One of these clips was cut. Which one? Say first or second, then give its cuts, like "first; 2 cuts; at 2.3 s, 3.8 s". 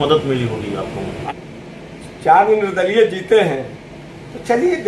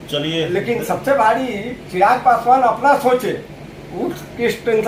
first; 1 cut; at 1.2 s